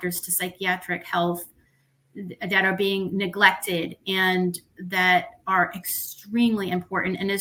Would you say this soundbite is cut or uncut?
uncut